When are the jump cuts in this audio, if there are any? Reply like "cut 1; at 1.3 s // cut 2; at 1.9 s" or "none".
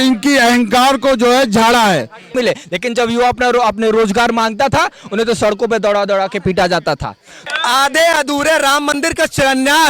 cut 1; at 2.3 s // cut 2; at 7.4 s